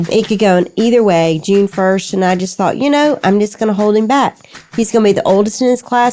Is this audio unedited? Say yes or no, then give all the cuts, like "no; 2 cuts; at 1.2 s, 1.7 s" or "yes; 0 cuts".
yes; 0 cuts